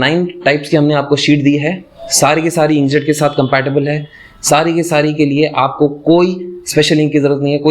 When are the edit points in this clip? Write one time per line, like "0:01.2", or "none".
none